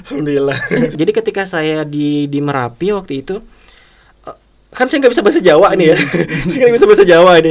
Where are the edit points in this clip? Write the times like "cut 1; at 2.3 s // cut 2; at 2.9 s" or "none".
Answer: cut 1; at 0.9 s

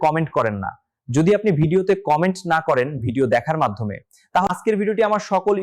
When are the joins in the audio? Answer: cut 1; at 4.5 s

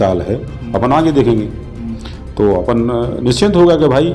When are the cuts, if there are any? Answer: none

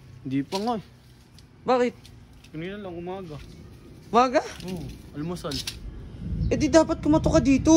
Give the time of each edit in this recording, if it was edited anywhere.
none

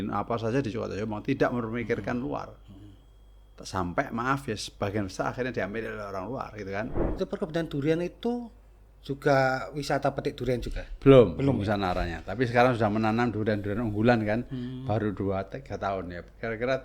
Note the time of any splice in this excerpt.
cut 1; at 7.0 s

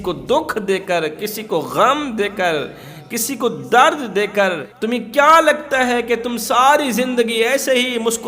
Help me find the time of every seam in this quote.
cut 1; at 4.7 s

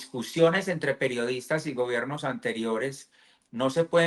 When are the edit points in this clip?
none

